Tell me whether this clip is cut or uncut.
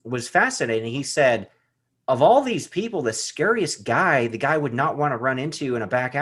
cut